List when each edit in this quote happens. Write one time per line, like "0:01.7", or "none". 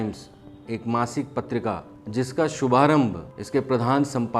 0:01.9
0:03.3